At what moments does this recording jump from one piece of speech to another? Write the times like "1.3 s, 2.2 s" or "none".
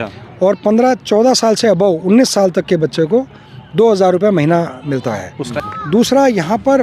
5.4 s